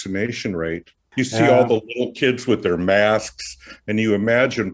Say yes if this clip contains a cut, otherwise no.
yes